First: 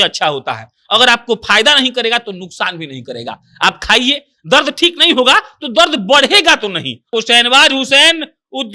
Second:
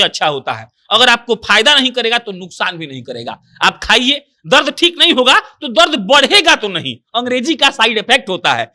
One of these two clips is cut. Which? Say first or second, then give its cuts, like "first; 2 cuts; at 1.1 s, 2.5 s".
first; 1 cut; at 7.1 s